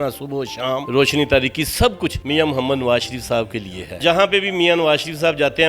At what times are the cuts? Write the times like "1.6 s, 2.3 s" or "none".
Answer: 0.9 s, 2.2 s, 4.0 s